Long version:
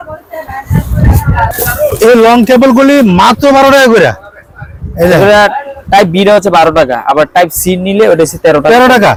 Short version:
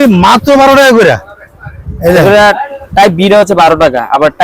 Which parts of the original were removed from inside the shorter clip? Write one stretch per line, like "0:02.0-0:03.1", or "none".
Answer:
none

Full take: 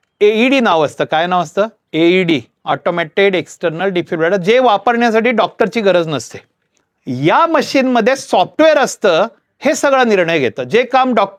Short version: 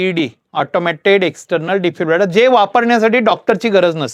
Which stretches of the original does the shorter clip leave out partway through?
none

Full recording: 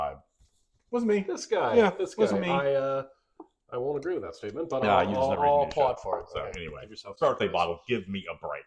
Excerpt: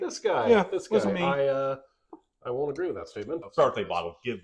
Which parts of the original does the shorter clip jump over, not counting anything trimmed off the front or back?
0:04.7-0:07.0

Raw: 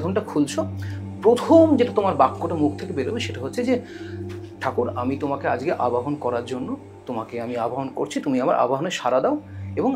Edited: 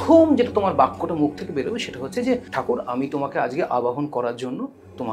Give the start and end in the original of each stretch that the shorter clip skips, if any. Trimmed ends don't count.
0:03.9-0:04.5

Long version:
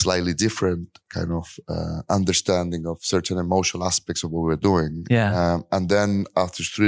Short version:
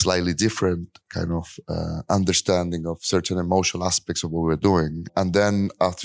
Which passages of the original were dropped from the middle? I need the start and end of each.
0:05.1-0:05.6

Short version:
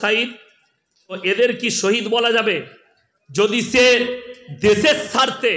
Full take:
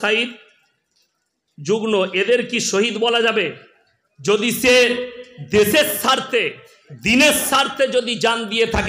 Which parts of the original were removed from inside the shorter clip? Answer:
0:01.2-0:02.1

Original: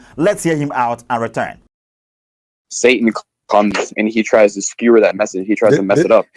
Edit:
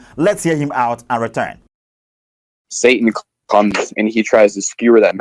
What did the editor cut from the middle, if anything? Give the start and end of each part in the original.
none

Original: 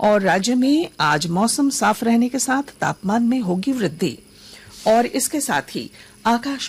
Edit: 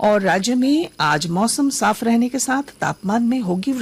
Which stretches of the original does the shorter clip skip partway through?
none

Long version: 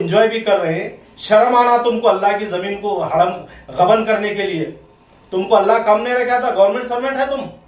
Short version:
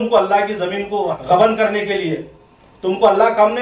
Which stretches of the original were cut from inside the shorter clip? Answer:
0:03.1-0:03.6

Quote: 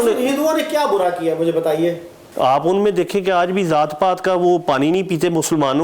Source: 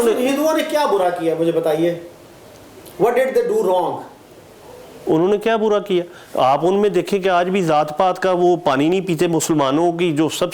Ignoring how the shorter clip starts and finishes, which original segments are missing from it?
0:02.2-0:06.2

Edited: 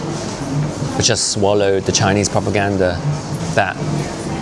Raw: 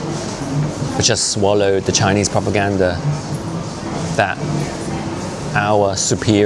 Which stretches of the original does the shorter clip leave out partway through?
0:03.4-0:04.0

